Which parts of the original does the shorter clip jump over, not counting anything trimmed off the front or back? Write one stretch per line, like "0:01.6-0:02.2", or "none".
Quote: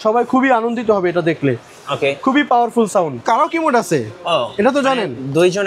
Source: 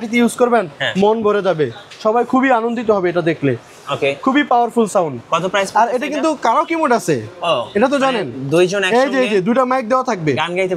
0:05.2-0:06.4